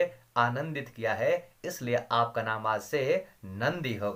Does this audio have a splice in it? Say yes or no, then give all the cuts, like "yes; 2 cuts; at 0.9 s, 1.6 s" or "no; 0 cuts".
no; 0 cuts